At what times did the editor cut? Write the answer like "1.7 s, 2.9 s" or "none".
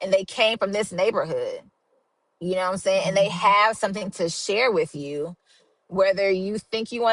none